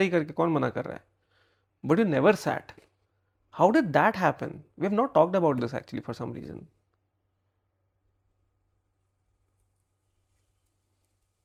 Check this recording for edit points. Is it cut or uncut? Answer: uncut